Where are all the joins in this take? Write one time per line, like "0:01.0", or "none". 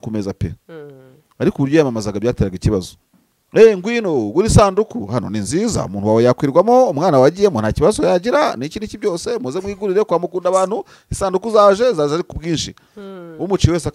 none